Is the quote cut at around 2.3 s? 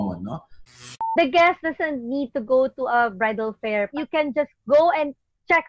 no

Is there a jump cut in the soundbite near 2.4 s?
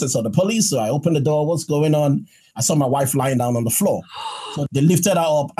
yes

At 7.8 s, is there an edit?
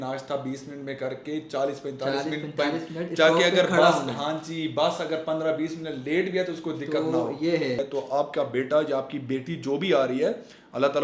yes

